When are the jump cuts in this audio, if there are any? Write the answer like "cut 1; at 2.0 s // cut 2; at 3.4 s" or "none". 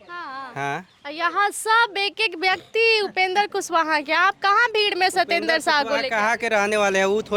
none